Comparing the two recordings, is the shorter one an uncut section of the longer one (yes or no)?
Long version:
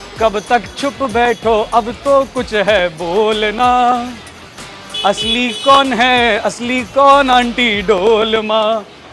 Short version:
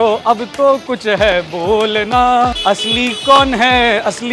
no